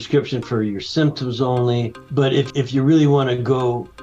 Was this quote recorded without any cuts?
no; 1 cut; at 2.1 s

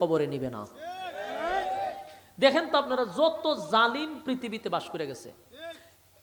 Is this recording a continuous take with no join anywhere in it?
yes; 0 cuts

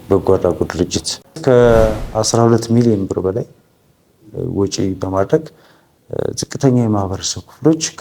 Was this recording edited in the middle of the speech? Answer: yes; 1 cut; at 1.3 s

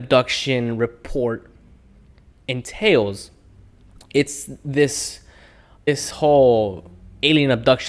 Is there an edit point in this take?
yes; 1 cut; at 5.9 s

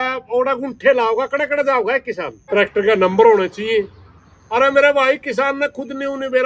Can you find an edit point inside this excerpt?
yes; 1 cut; at 2.3 s

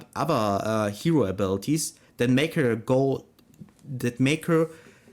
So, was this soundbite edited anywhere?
no; 0 cuts

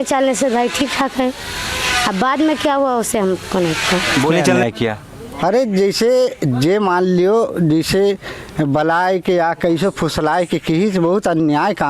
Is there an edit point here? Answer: yes; 1 cut; at 4.5 s

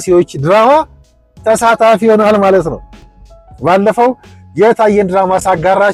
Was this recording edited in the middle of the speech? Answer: no; 0 cuts

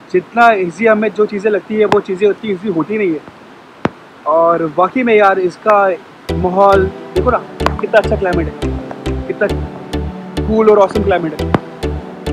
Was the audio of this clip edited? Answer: no; 0 cuts

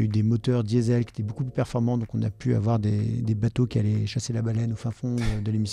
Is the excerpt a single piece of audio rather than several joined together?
yes; 0 cuts

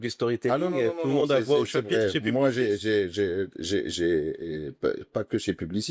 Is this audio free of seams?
yes; 0 cuts

